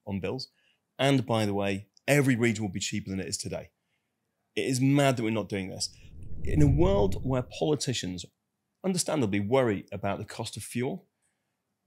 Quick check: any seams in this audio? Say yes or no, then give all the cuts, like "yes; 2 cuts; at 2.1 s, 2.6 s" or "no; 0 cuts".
yes; 1 cut; at 6.1 s